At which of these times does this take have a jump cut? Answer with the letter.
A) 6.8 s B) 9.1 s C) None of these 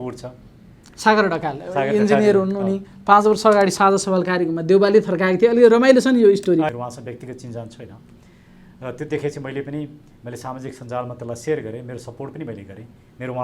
A